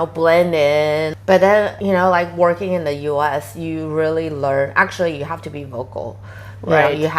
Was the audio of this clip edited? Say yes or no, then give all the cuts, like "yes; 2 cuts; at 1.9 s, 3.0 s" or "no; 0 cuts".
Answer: yes; 1 cut; at 1.1 s